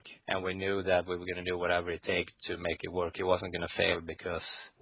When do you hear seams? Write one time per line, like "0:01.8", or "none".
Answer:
none